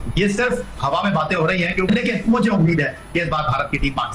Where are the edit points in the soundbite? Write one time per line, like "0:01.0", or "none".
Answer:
0:01.9